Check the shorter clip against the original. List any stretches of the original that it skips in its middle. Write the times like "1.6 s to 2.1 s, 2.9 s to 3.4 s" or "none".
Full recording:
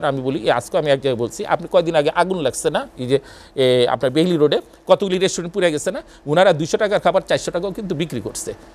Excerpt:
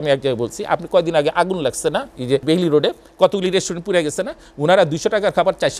3.2 s to 4.1 s